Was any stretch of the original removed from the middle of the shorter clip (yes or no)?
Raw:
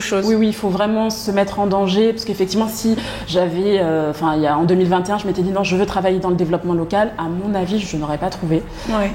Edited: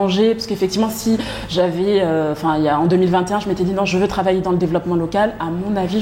no